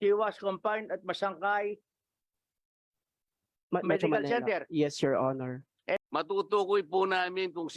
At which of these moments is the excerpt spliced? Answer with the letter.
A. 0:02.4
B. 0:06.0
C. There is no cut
B